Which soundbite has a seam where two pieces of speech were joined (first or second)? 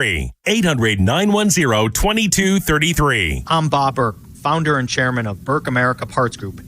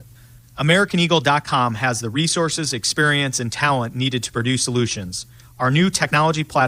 first